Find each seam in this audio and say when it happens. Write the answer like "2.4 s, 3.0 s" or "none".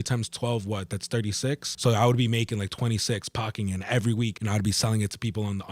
1.7 s, 4.4 s